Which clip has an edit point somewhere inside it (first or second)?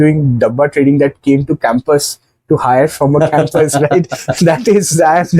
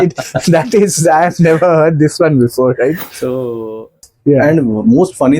second